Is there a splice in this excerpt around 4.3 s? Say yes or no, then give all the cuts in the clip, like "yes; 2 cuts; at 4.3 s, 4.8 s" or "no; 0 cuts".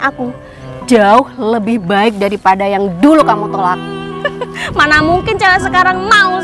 yes; 1 cut; at 4.3 s